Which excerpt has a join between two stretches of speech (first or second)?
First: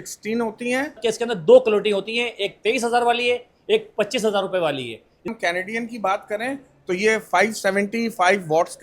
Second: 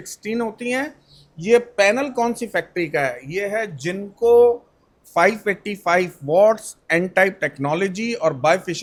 first